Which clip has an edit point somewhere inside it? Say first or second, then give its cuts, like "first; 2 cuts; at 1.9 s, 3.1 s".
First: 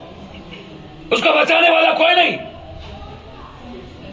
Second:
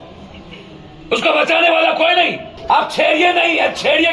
second; 1 cut; at 2.5 s